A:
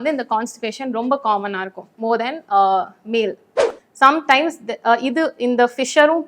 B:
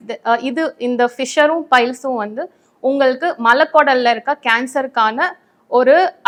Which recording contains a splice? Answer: A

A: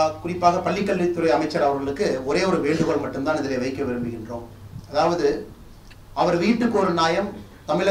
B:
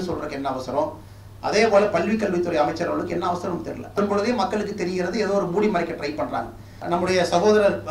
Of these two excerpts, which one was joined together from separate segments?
B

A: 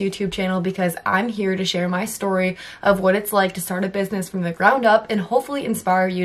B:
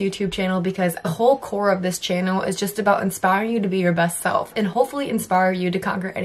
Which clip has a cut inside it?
B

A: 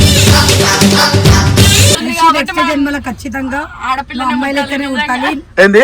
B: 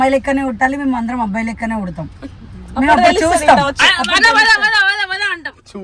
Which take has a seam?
A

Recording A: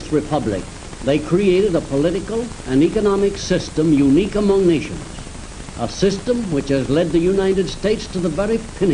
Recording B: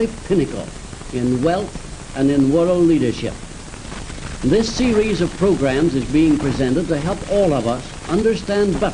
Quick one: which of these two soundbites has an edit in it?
B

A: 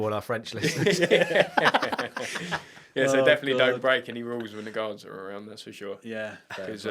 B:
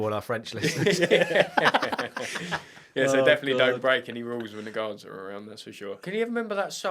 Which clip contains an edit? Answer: B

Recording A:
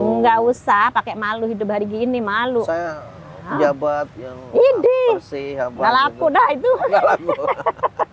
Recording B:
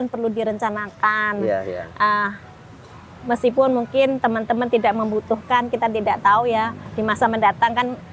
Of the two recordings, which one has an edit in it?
B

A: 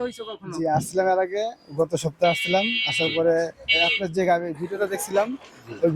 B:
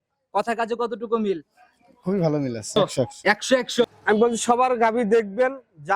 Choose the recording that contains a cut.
B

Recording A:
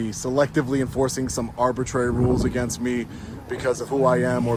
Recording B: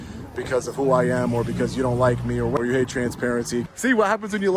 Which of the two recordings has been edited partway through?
B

